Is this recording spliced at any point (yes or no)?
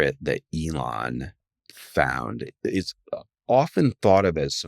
yes